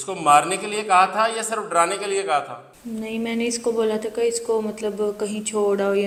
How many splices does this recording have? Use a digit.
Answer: 0